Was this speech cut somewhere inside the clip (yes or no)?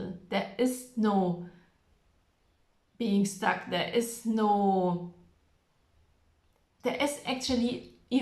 no